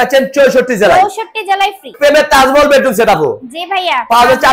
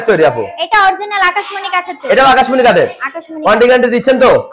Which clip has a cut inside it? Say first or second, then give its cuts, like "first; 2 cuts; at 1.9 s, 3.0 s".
first; 1 cut; at 1.9 s